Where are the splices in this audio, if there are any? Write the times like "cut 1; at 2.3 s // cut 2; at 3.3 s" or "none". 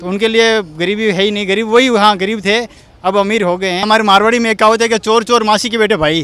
cut 1; at 3.8 s